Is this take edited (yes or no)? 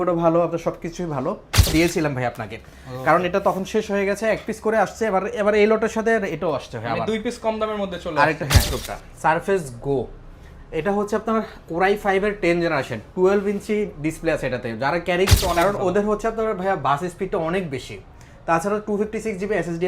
yes